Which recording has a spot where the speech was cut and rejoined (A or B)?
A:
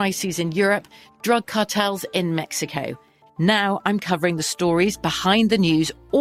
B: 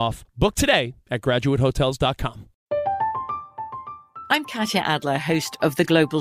B